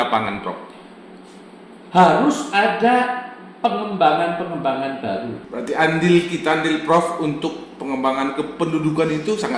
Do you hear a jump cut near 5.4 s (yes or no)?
yes